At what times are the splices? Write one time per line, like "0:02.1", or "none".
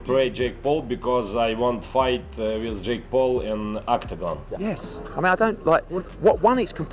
0:04.5